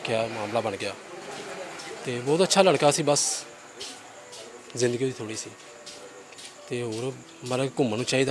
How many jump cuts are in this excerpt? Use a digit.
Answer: 0